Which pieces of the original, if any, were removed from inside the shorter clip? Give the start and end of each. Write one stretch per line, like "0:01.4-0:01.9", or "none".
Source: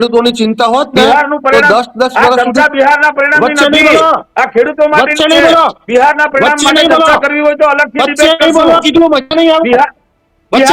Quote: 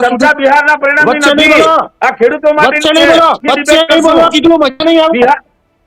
0:05.8-0:07.9